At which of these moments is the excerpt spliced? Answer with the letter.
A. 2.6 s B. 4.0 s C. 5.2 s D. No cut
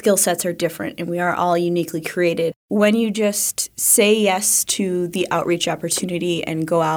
A